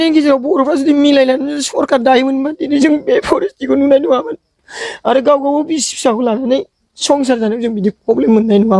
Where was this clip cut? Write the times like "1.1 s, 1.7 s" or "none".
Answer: none